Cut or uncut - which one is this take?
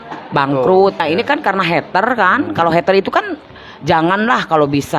cut